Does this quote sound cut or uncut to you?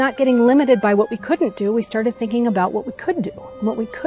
uncut